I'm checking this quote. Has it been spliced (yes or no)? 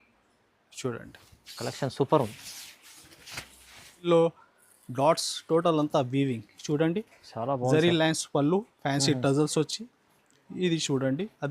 yes